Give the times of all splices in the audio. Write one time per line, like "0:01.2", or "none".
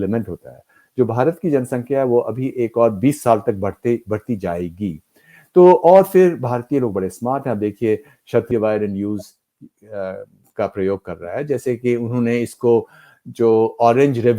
0:08.5